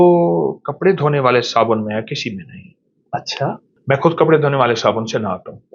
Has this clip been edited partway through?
no; 0 cuts

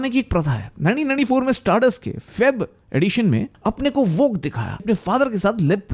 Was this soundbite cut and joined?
yes; 2 cuts; at 3.5 s, 4.8 s

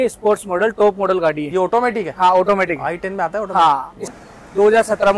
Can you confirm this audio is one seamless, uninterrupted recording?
no; 1 cut; at 4.1 s

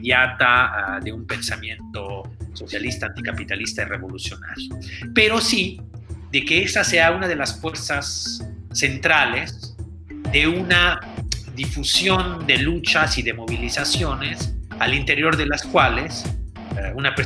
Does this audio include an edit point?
no; 0 cuts

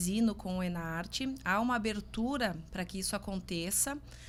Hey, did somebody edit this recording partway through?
no; 0 cuts

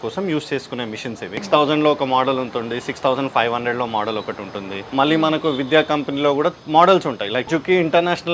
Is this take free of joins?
no; 4 cuts; at 1.4 s, 4.8 s, 6.6 s, 7.5 s

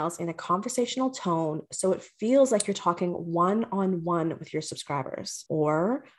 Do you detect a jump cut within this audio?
no; 0 cuts

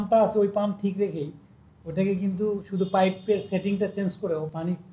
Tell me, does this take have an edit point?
no; 0 cuts

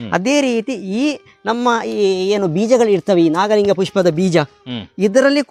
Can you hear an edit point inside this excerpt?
no; 0 cuts

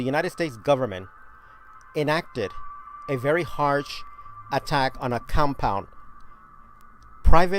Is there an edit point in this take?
yes; 1 cut; at 5.7 s

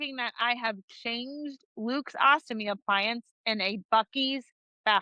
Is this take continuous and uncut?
yes; 0 cuts

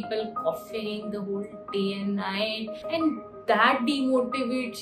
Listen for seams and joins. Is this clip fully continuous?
no; 1 cut; at 2.8 s

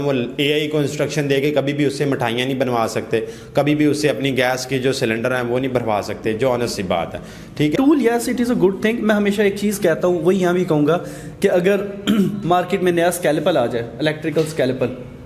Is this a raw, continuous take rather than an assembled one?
no; 1 cut; at 7.7 s

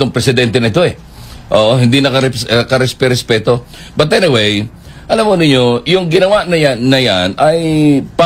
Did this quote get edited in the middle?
no; 0 cuts

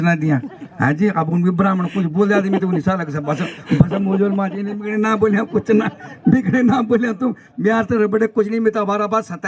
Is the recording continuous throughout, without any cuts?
yes; 0 cuts

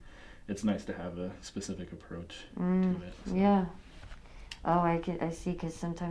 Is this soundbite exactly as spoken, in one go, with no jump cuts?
yes; 0 cuts

